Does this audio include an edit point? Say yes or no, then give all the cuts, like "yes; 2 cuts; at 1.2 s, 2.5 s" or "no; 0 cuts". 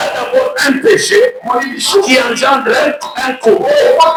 no; 0 cuts